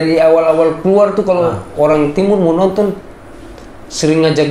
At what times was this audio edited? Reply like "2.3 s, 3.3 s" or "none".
none